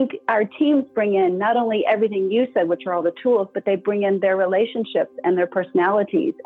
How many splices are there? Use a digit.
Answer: 0